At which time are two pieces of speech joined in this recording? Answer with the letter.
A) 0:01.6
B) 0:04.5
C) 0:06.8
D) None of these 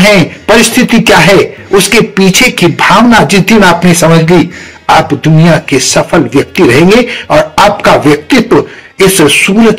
D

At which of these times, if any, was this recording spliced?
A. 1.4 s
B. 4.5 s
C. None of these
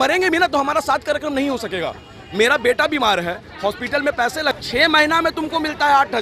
B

